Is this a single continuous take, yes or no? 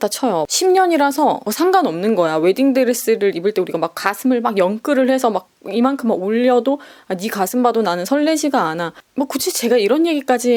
yes